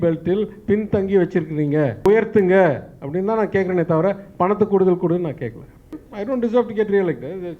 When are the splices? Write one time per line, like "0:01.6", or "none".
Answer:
0:02.1
0:05.9